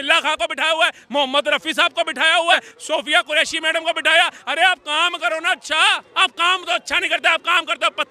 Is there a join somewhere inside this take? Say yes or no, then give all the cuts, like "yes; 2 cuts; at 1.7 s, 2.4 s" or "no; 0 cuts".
yes; 2 cuts; at 2.7 s, 6.0 s